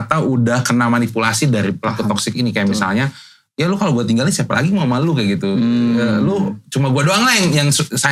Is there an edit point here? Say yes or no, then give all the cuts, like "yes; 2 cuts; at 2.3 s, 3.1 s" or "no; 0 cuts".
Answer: no; 0 cuts